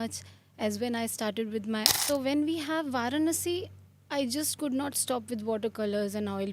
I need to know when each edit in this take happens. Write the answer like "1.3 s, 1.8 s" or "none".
1.9 s